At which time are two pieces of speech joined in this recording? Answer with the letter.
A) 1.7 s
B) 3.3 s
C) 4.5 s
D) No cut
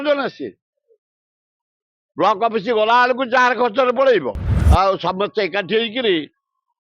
C